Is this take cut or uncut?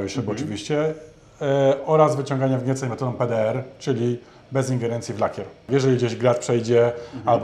cut